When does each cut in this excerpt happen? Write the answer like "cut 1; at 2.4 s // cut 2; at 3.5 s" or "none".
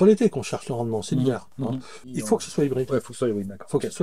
cut 1; at 2.1 s